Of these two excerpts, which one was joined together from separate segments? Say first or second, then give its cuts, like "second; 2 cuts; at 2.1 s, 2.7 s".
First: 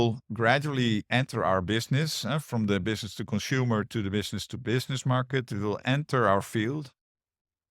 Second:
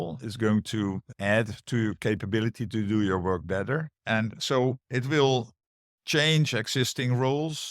second; 2 cuts; at 1.1 s, 4.0 s